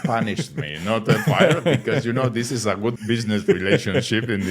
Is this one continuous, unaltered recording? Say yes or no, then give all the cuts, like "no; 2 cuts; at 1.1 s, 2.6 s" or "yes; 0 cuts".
no; 1 cut; at 3.0 s